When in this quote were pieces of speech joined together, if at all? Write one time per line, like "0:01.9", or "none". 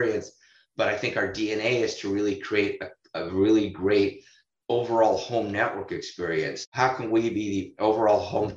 0:06.6